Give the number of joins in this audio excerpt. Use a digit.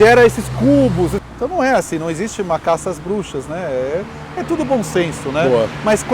1